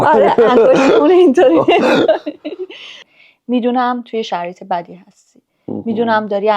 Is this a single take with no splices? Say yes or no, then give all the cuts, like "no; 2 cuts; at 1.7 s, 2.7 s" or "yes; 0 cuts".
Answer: no; 1 cut; at 3.1 s